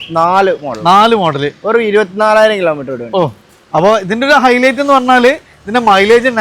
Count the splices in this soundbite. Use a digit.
0